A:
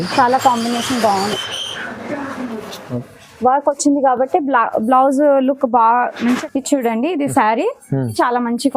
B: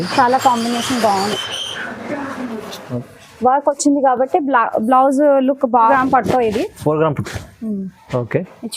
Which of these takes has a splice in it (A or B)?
B